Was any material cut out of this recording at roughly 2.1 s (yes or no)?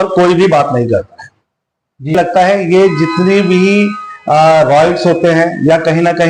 yes